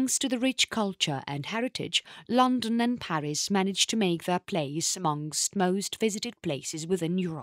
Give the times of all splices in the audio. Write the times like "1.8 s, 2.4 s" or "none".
none